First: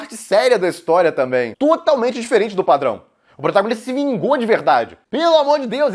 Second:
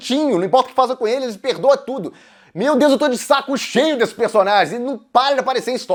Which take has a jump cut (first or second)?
first